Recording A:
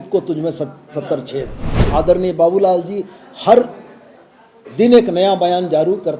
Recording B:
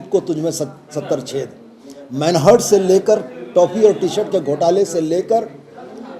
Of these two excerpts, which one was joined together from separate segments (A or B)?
A